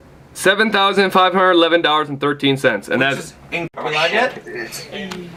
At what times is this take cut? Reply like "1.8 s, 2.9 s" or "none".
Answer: none